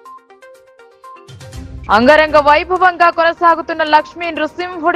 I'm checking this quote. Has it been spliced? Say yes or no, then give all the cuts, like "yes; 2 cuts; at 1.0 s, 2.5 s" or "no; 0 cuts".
yes; 1 cut; at 1.2 s